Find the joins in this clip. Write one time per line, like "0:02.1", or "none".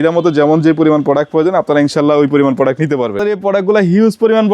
0:03.2